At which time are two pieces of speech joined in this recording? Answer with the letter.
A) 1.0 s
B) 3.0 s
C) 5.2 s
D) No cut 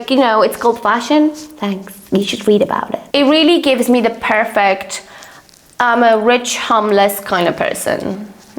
B